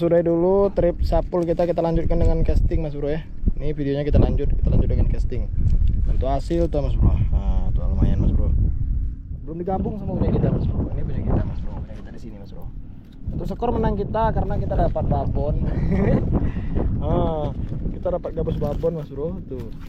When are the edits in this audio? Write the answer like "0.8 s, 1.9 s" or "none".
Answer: none